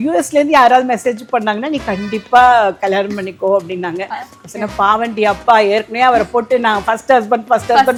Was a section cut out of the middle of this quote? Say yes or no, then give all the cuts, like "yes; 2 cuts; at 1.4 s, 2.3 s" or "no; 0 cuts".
no; 0 cuts